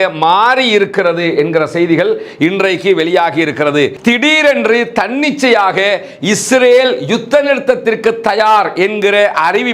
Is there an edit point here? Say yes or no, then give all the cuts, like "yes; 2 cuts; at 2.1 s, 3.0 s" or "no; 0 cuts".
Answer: yes; 1 cut; at 4.0 s